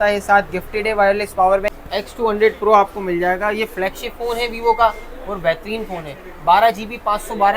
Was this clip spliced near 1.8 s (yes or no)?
yes